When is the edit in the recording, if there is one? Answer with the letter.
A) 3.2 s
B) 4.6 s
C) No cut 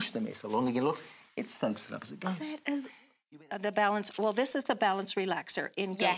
A